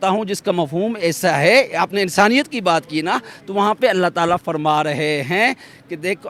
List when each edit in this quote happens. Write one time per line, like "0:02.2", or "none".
none